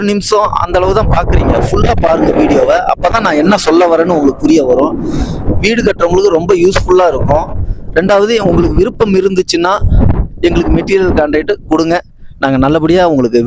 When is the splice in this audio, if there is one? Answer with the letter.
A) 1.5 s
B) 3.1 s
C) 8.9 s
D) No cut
D